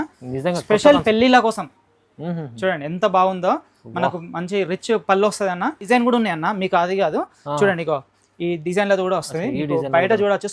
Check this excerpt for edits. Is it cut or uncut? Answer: cut